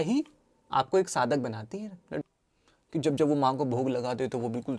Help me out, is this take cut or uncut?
cut